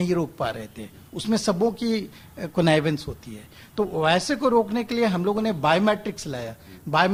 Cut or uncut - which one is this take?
uncut